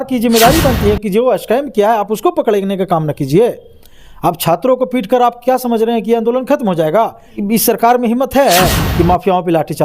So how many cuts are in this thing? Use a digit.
1